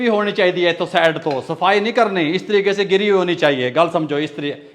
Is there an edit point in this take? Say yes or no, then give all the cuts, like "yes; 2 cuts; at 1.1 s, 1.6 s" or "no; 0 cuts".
no; 0 cuts